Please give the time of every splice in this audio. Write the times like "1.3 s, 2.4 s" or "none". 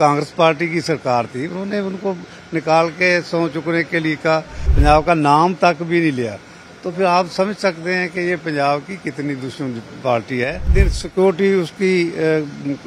4.6 s, 10.8 s